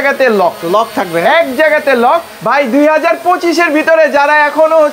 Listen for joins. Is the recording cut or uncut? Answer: cut